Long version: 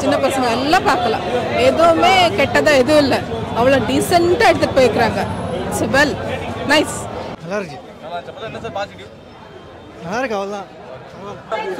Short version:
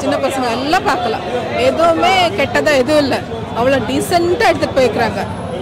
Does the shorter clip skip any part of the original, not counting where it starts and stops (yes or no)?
no